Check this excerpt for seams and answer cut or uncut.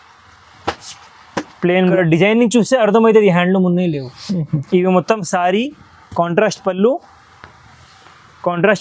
cut